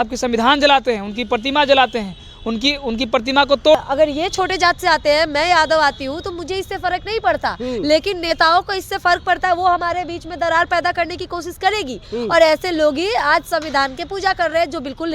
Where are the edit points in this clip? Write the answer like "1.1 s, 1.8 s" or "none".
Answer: 3.7 s